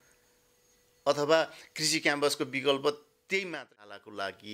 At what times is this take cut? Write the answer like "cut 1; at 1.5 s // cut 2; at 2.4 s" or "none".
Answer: cut 1; at 3.5 s